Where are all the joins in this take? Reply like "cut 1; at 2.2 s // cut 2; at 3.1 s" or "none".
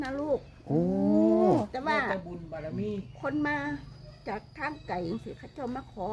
none